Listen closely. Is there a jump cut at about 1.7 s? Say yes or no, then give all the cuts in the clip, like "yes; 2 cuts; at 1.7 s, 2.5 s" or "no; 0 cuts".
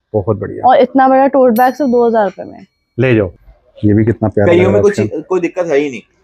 no; 1 cut; at 3.3 s